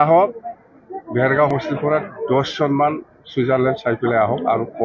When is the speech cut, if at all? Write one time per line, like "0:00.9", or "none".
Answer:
0:01.5